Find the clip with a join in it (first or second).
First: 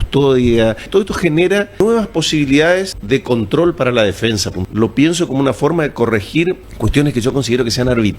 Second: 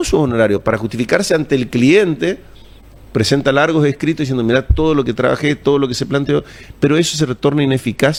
first